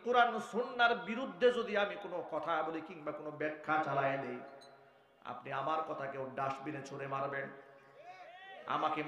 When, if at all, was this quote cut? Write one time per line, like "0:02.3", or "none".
none